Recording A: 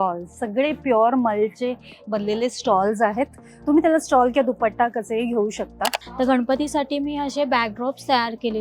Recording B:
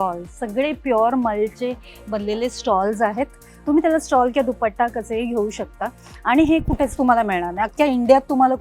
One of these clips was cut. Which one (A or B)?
A